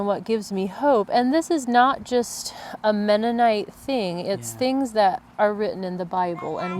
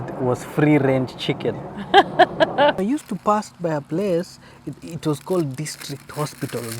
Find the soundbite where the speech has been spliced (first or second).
second